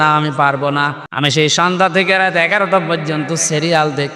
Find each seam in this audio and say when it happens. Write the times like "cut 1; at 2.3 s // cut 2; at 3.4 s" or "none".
cut 1; at 1.0 s